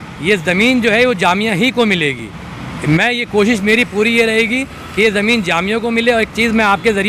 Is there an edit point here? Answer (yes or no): no